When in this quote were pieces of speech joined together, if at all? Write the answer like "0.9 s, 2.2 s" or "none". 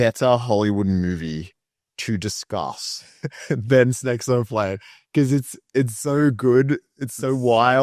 none